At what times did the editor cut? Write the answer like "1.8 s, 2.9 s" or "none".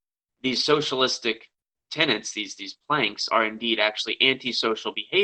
none